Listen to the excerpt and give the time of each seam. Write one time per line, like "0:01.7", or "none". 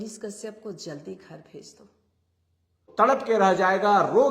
0:02.9